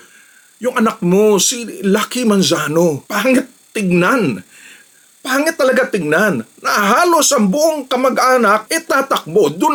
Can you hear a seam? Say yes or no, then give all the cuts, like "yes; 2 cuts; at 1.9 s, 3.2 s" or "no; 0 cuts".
no; 0 cuts